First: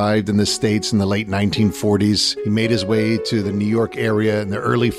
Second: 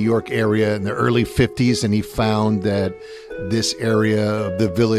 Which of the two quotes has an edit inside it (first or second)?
first